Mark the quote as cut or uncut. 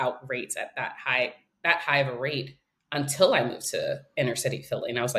uncut